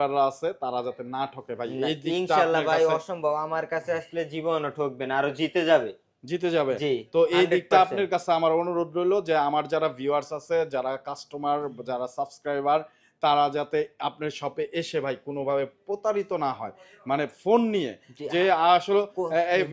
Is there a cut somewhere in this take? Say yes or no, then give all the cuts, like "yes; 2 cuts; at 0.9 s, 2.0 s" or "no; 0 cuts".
no; 0 cuts